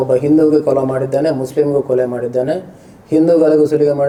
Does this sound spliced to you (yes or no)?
no